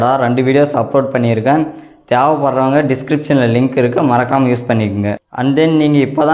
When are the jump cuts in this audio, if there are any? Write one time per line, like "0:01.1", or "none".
0:05.3